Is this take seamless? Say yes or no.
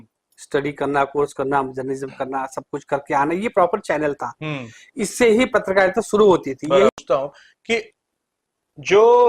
no